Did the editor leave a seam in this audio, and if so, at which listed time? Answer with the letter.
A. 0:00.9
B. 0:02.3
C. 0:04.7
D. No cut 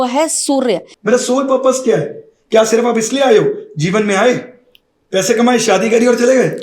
A